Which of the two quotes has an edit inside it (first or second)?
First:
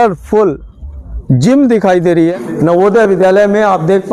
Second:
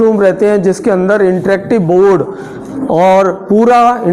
first